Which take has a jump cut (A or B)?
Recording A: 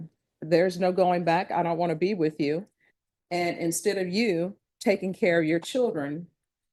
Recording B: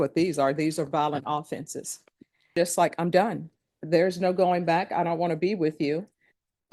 B